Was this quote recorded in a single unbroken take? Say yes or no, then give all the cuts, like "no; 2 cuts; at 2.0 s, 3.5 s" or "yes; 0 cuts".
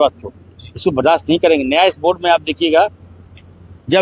yes; 0 cuts